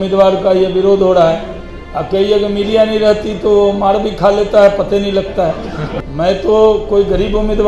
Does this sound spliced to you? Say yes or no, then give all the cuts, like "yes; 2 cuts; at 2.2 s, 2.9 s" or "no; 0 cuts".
yes; 1 cut; at 5.8 s